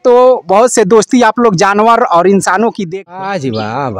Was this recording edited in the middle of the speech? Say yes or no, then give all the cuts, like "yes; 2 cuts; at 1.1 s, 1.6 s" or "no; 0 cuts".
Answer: yes; 1 cut; at 2.8 s